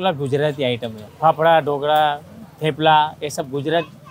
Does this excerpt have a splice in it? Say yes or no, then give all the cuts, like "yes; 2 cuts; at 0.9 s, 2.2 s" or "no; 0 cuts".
no; 0 cuts